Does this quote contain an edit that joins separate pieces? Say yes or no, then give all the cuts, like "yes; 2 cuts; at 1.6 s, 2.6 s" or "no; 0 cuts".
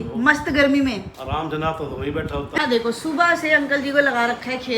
yes; 1 cut; at 2.6 s